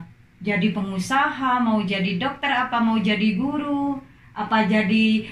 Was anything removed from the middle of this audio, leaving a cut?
no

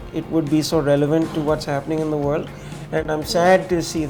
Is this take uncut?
yes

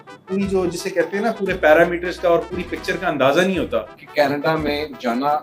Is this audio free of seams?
no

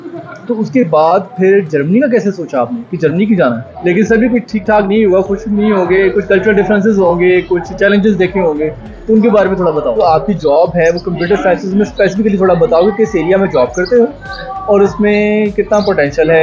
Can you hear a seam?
yes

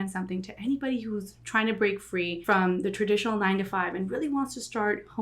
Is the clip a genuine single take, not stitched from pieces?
no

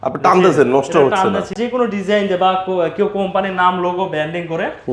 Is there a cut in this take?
yes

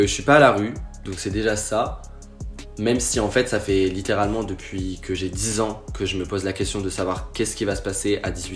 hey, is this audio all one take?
yes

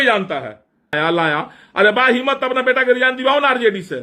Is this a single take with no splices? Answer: no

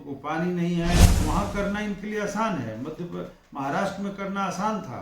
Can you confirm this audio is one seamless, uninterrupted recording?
no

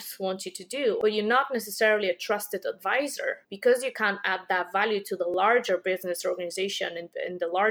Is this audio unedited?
no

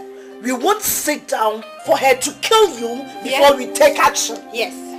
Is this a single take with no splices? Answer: yes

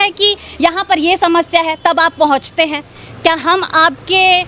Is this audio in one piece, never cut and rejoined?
yes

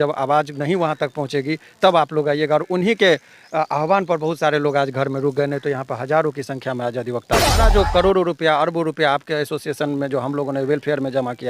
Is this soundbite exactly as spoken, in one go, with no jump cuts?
no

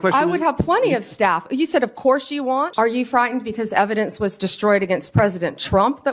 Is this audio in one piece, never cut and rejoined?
no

